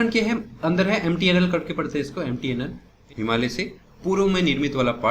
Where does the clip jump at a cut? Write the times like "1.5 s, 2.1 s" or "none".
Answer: 2.9 s